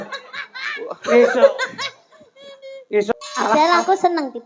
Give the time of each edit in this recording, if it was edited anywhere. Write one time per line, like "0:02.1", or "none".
0:03.1